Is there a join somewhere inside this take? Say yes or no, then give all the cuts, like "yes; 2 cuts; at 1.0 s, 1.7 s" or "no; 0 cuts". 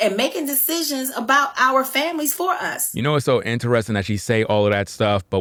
no; 0 cuts